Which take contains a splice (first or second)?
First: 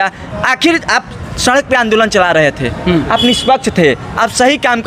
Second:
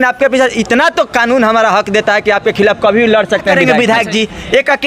second